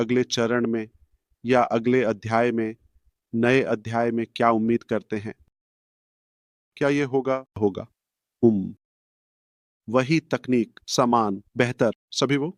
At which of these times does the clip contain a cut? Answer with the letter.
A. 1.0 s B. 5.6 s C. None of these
C